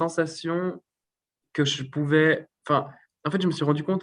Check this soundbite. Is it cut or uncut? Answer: uncut